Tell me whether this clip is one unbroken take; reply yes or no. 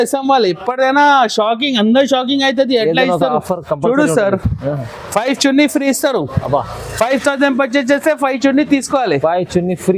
yes